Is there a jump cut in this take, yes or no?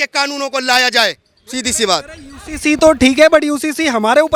no